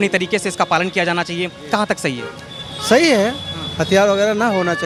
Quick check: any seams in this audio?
no; 0 cuts

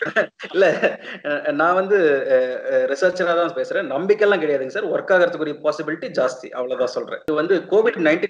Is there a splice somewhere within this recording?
yes; 1 cut; at 7.2 s

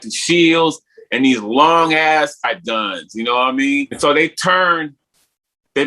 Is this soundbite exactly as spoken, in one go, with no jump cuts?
no; 2 cuts; at 2.4 s, 3.9 s

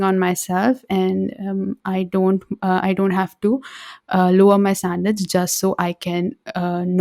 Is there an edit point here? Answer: no; 0 cuts

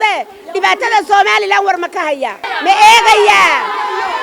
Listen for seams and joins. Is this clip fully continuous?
no; 1 cut; at 2.5 s

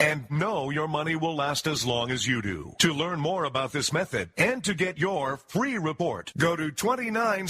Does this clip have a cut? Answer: no; 0 cuts

